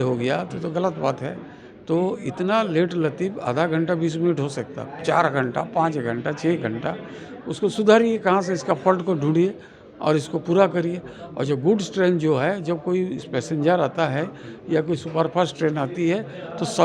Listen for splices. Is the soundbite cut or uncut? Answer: uncut